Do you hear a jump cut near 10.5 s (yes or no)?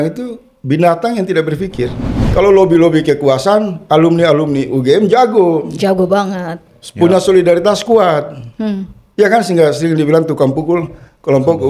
no